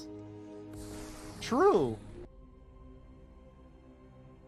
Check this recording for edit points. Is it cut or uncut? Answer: cut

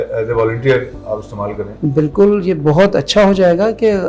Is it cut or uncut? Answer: cut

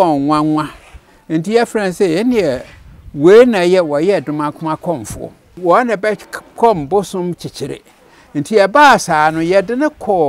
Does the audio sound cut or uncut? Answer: cut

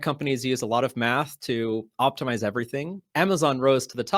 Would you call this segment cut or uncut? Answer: cut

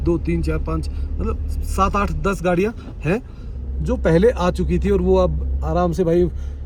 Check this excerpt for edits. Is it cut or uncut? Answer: uncut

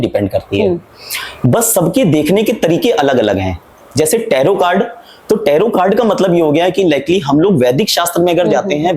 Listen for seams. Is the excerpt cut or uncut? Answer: uncut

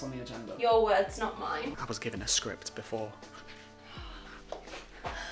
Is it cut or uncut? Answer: cut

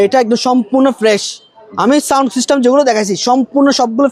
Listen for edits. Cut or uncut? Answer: uncut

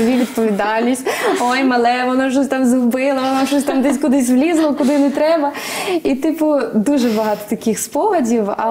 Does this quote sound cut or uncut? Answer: uncut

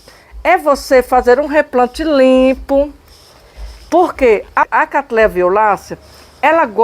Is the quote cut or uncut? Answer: cut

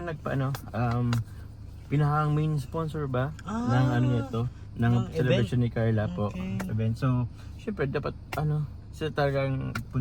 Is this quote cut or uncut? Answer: uncut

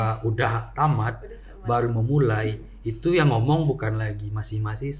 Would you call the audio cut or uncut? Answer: uncut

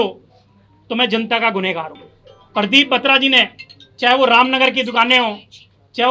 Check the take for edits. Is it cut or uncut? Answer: cut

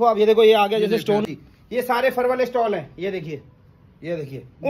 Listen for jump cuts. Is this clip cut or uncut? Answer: cut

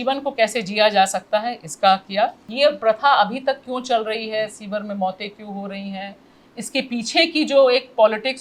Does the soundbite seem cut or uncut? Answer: cut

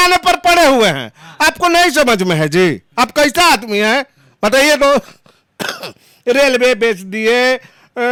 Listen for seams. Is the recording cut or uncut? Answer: uncut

